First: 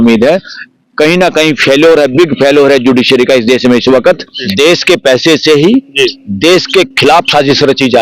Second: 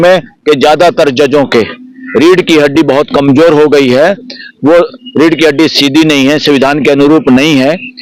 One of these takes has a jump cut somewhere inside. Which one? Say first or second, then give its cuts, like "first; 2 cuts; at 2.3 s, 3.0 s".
first; 1 cut; at 4.4 s